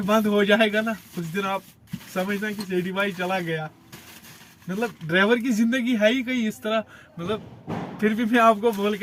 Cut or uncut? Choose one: uncut